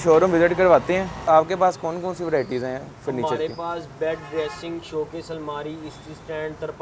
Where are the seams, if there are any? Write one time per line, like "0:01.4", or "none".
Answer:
0:01.2